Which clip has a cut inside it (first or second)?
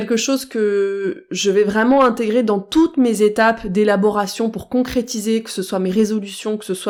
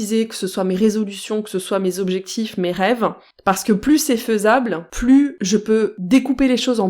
second